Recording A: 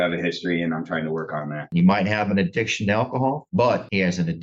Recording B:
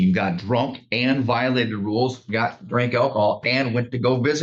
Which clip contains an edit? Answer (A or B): A